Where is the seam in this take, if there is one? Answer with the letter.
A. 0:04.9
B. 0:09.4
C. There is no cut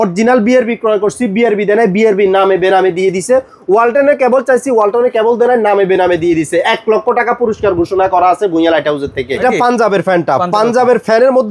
B